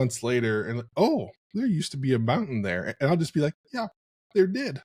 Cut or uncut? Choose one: uncut